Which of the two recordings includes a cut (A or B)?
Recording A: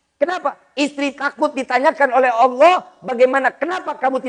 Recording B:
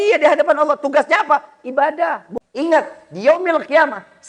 B